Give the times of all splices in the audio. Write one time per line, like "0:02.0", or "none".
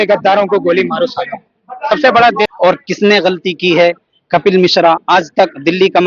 0:02.5